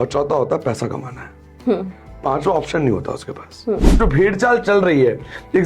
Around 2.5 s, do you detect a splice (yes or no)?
no